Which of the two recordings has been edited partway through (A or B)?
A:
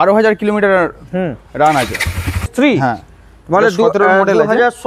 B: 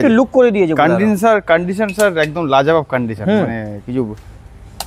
A